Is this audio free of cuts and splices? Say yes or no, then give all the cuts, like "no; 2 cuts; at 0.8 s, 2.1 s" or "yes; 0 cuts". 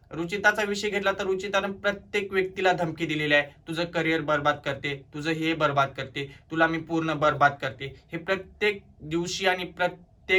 yes; 0 cuts